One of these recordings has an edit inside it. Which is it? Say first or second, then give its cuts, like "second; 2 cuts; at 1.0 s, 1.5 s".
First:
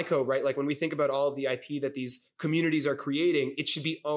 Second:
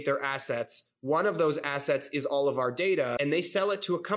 second; 1 cut; at 3.1 s